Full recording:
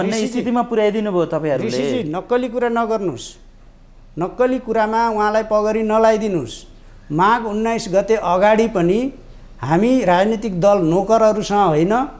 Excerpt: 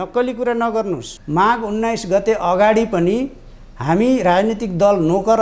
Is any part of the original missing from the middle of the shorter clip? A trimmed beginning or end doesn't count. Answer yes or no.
yes